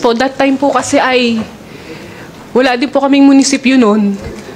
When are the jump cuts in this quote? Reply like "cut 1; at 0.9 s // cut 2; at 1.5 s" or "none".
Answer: none